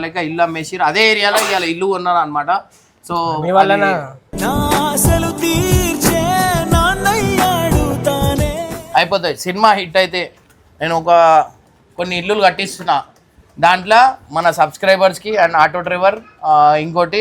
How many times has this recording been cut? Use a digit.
1